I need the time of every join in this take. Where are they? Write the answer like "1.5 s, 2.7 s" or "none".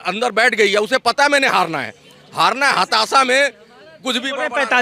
none